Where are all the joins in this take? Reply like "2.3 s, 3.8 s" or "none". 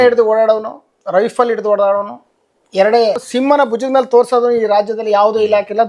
3.2 s